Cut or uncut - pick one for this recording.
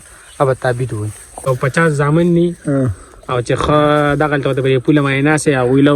cut